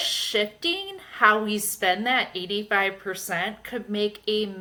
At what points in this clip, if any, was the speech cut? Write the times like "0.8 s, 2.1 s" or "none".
none